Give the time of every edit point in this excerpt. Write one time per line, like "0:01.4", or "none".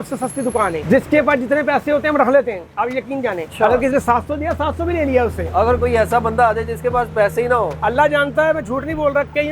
0:00.8
0:03.5